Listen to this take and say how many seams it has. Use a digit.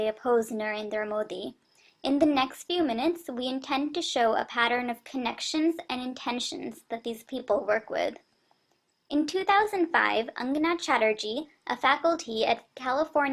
1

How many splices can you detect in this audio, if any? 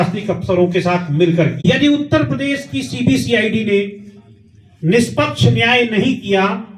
1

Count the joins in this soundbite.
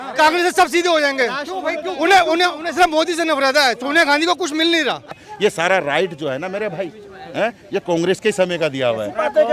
1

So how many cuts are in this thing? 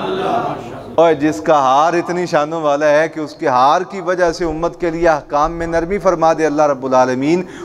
0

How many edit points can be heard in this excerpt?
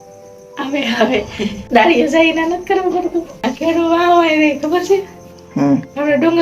2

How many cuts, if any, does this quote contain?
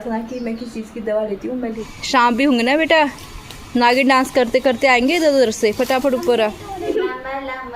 2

